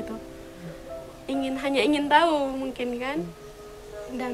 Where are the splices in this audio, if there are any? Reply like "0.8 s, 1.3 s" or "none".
none